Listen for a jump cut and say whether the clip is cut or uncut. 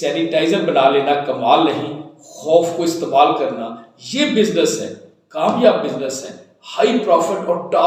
uncut